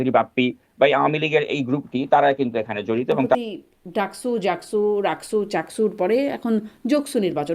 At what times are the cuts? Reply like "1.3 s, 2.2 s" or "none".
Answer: 3.3 s